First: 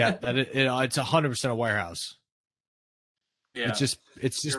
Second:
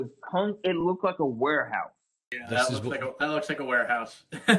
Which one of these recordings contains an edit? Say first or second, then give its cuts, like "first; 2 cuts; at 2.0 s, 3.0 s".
second; 1 cut; at 2.4 s